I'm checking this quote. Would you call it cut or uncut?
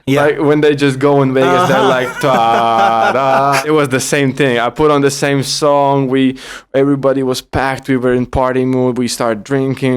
cut